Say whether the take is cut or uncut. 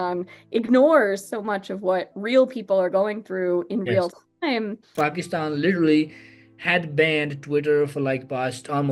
cut